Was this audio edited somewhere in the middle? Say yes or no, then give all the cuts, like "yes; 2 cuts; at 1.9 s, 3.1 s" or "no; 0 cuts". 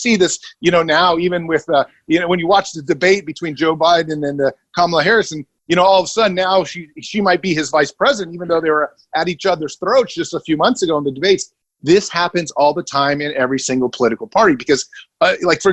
no; 0 cuts